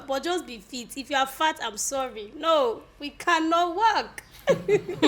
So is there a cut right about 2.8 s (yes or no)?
no